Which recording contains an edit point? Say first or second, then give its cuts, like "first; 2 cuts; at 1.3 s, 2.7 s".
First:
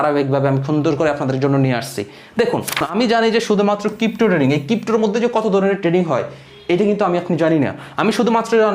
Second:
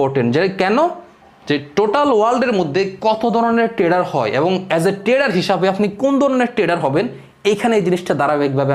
first; 1 cut; at 2.9 s